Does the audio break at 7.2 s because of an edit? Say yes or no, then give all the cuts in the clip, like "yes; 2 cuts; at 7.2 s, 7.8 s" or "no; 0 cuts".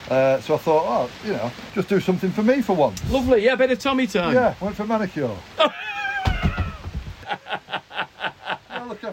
yes; 2 cuts; at 1.6 s, 7.2 s